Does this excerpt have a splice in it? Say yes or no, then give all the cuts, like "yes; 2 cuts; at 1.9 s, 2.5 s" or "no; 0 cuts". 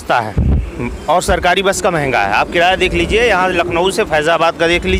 no; 0 cuts